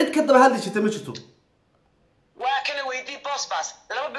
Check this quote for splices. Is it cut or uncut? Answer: uncut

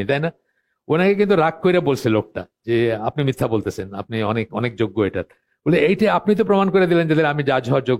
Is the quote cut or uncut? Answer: uncut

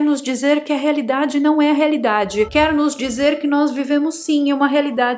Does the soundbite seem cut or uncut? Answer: uncut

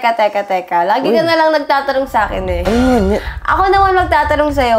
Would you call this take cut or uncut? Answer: uncut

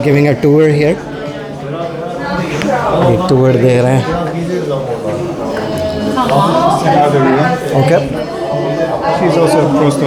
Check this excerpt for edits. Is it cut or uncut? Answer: uncut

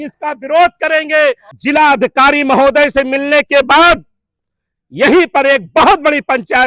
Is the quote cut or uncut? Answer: cut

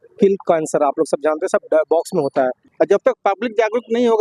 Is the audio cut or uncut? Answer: cut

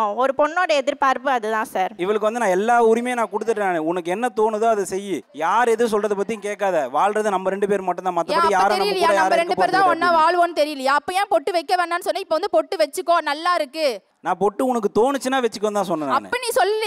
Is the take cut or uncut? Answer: cut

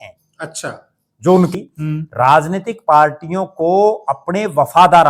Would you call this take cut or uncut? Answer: cut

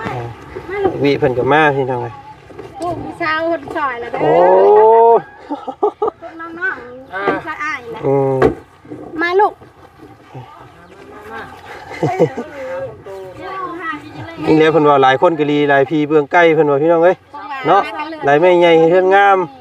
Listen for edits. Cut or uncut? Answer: uncut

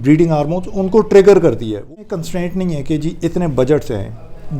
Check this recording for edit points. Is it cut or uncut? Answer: cut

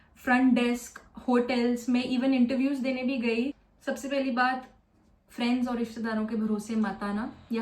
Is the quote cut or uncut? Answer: cut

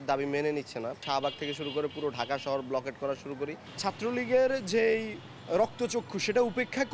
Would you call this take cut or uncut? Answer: cut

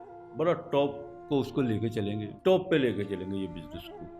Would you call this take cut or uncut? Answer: cut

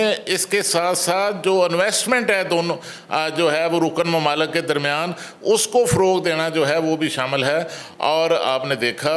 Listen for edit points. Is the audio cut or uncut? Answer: uncut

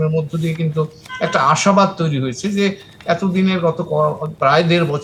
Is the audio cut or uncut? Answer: uncut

